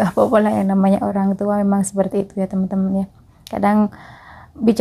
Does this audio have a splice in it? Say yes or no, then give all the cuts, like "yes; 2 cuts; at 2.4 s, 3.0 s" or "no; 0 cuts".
no; 0 cuts